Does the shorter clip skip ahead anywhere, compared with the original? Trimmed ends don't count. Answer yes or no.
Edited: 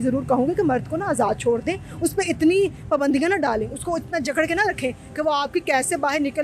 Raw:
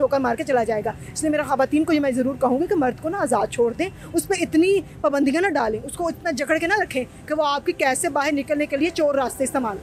no